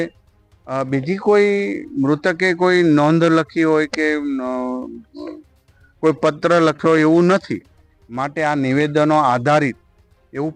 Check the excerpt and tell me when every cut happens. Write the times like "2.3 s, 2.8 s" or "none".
none